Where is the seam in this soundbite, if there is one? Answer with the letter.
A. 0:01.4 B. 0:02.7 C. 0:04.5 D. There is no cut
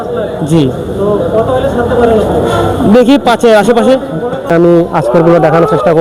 C